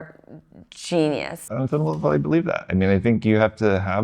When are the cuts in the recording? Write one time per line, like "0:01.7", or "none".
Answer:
0:01.4

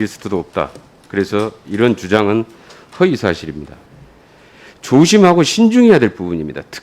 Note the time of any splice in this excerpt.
0:03.8

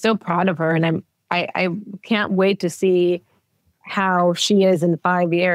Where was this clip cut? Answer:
none

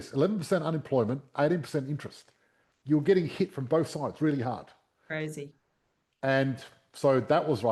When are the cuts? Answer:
none

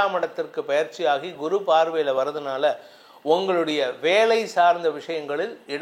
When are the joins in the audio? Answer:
none

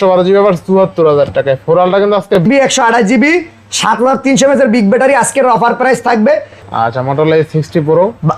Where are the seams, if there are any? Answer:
0:02.4
0:06.6

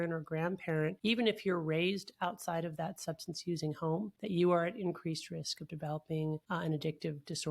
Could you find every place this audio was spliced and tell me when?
0:01.0
0:04.2
0:06.4

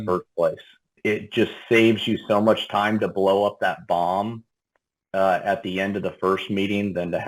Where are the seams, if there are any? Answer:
0:00.9

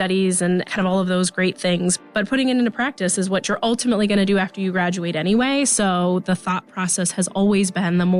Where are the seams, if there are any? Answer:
none

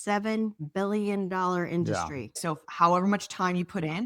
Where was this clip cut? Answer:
0:02.4

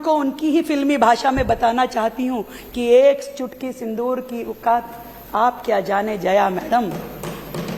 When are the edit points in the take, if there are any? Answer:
none

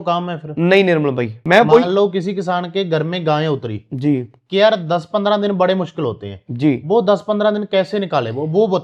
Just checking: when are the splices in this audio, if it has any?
0:01.4

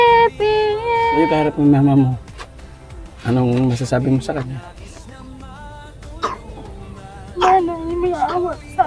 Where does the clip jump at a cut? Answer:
0:01.2

